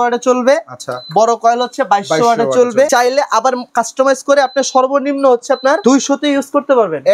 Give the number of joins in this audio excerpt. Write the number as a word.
two